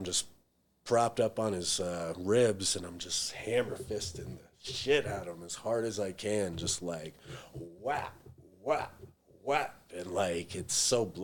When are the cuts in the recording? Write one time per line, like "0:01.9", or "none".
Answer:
none